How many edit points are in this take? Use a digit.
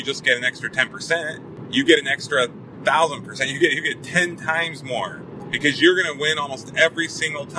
2